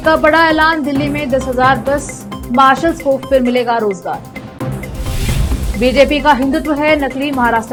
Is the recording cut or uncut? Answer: uncut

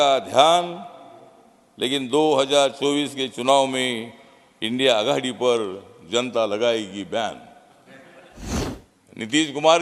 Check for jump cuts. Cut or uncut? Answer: cut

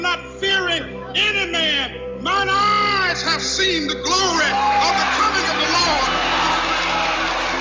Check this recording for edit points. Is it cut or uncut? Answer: uncut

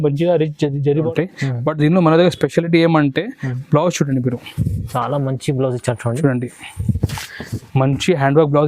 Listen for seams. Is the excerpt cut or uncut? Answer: cut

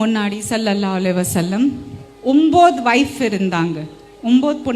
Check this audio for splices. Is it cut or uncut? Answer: uncut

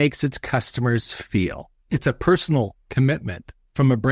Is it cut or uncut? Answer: cut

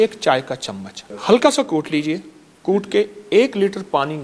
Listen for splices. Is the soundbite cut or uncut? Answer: uncut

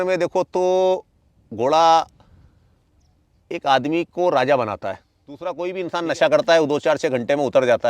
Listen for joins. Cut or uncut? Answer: cut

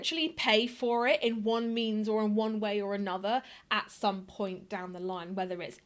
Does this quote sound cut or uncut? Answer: uncut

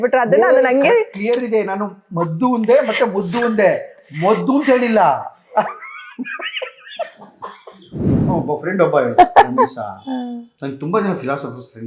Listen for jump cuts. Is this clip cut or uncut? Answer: cut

